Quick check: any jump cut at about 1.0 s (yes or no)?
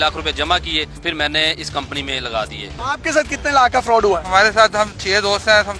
yes